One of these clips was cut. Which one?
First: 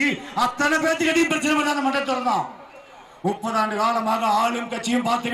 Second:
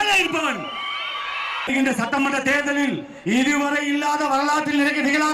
second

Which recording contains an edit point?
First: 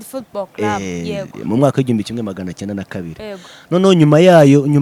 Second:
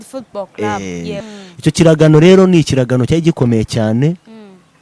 second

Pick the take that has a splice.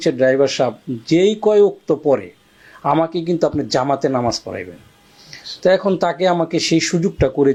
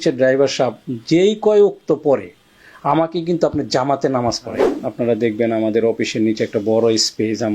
second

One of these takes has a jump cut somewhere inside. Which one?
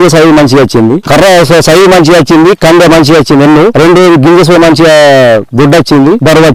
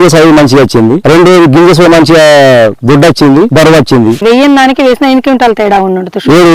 second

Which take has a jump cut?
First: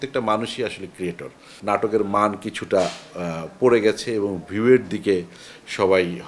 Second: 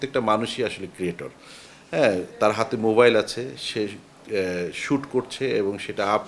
first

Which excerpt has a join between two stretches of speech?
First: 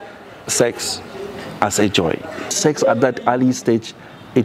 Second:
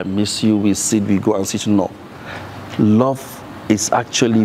first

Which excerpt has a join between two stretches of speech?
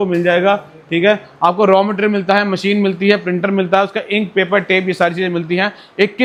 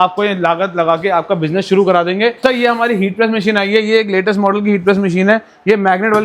second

